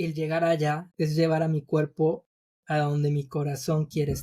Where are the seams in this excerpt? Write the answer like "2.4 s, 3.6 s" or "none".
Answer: 0.9 s